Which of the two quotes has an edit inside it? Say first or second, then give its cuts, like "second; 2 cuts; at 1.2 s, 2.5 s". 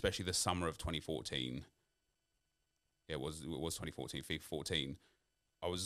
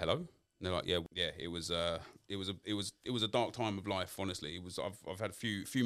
second; 1 cut; at 1.0 s